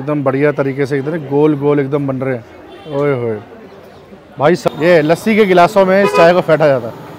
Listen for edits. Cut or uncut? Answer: cut